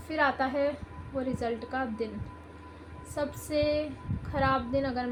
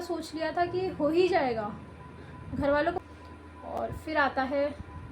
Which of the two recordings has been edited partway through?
second; 1 cut; at 3.0 s

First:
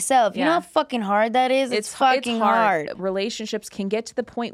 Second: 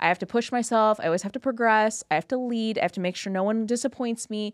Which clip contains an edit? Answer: first; 1 cut; at 2.9 s

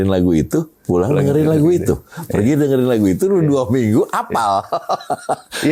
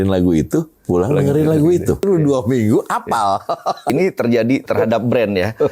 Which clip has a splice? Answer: second; 2 cuts; at 2.0 s, 3.9 s

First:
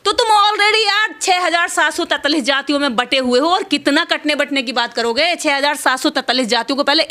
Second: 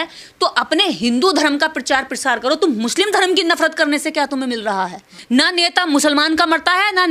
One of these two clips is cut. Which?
second; 1 cut; at 5.1 s

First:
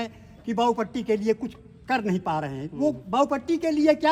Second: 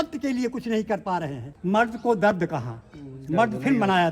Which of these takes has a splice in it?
second; 1 cut; at 1.4 s

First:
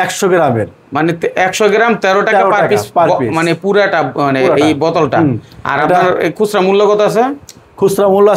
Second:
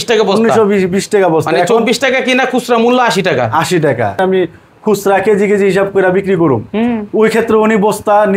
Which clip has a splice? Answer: second; 1 cut; at 4.2 s

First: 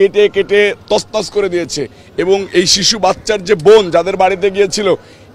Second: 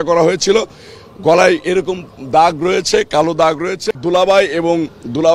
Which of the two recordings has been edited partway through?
second; 1 cut; at 3.9 s

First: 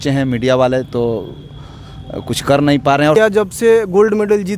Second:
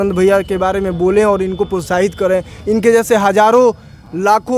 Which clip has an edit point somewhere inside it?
first; 1 cut; at 3.2 s

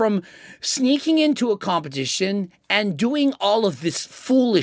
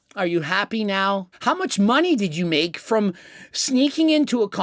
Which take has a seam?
second; 1 cut; at 1.3 s

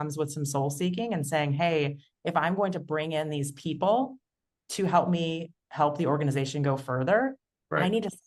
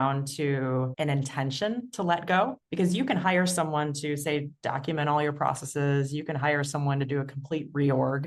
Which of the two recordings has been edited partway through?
second; 2 cuts; at 0.9 s, 2.6 s

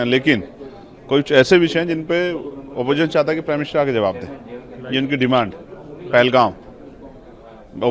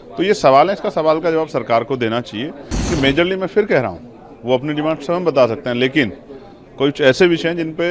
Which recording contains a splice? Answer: second; 1 cut; at 2.7 s

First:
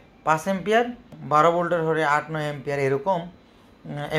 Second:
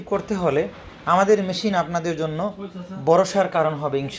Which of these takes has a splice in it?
first; 1 cut; at 1.2 s

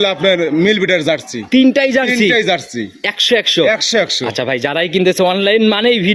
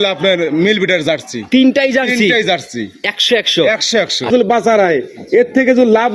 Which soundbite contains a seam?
second; 1 cut; at 4.3 s

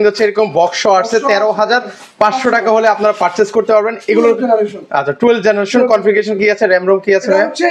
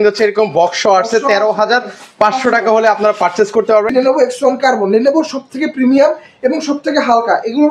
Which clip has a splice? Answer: second; 1 cut; at 3.9 s

